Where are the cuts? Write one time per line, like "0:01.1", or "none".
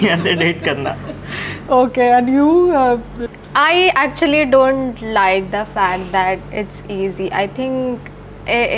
none